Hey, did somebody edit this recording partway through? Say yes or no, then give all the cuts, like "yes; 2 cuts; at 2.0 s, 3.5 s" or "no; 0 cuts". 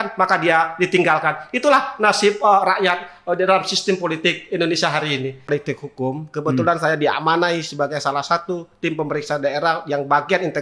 yes; 1 cut; at 5.5 s